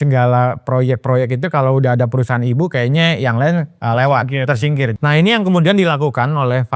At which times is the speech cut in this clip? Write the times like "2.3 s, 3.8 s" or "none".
3.7 s, 4.9 s